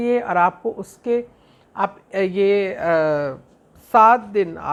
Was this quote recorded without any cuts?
yes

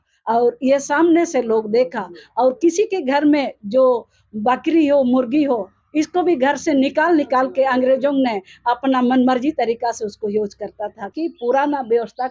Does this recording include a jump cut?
yes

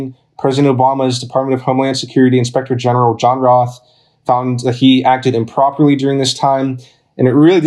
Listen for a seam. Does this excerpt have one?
no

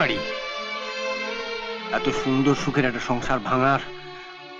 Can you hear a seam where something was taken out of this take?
no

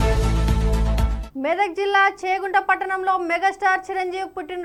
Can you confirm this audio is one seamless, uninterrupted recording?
yes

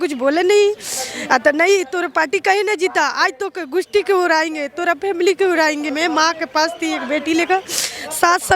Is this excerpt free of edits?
no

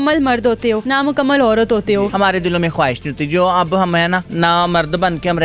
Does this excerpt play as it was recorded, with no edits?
no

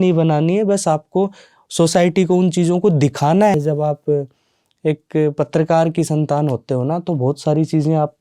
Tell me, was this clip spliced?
yes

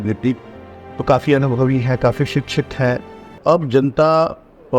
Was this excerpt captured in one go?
no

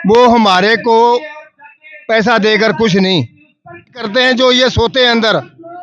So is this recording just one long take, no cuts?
no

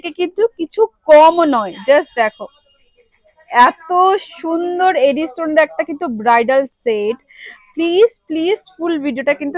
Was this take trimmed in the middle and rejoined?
no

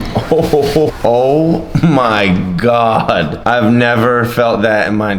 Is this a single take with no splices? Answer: no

